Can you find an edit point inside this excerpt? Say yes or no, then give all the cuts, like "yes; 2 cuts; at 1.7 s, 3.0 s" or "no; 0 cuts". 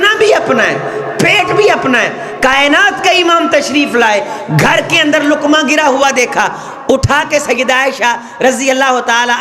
no; 0 cuts